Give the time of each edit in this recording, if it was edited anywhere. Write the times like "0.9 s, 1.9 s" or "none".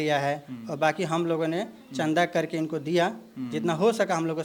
none